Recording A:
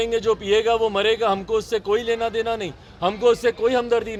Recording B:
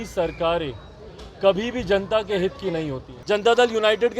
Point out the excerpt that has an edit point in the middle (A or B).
B